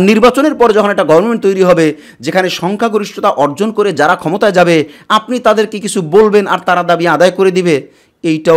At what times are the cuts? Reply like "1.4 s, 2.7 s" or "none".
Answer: none